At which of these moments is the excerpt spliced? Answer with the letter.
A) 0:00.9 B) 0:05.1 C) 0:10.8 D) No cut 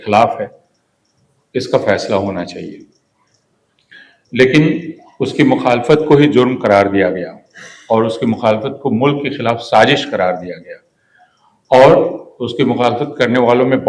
D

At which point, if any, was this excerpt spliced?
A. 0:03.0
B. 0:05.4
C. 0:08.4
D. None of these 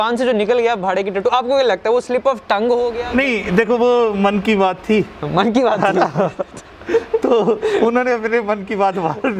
A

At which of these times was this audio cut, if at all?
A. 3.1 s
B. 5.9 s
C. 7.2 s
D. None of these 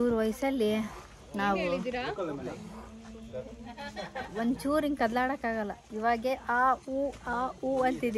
D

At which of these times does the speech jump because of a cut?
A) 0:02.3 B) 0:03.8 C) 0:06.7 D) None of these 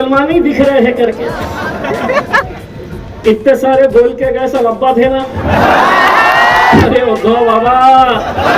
C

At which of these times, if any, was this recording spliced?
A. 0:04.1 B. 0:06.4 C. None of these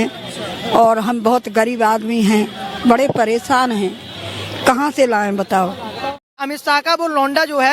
B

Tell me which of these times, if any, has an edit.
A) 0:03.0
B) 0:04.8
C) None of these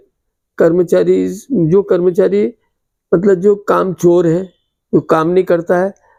C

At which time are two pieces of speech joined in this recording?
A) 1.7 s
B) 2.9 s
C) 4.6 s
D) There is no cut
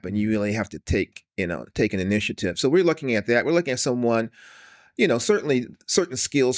D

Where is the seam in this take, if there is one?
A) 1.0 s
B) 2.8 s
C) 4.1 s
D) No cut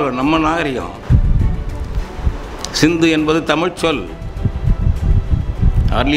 A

